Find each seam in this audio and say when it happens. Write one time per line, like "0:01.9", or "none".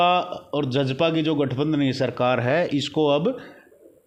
none